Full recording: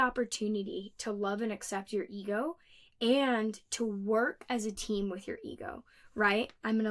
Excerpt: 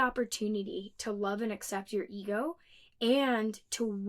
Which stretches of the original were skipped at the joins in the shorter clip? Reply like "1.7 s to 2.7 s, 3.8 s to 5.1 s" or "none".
none

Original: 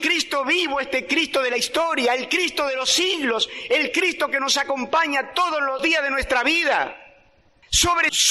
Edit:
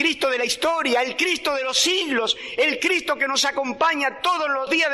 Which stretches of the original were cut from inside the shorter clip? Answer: none

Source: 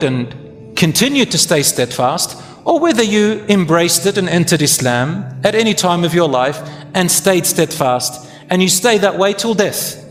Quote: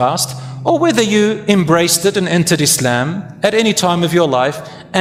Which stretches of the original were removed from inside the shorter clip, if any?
none

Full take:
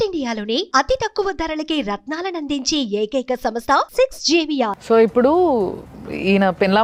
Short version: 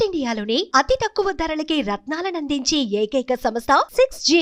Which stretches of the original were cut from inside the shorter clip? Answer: none

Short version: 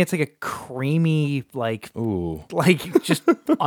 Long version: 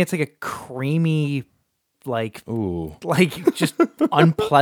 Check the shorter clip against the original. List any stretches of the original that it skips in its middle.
1.5 s to 2.0 s

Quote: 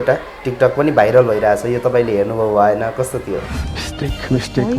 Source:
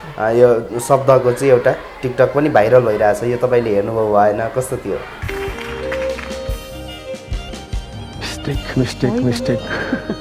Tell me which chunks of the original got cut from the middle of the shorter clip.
5.2 s to 8.1 s

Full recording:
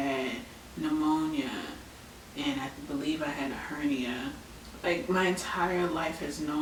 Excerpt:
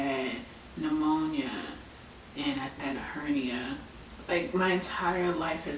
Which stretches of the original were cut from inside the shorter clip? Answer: 2.8 s to 3.3 s

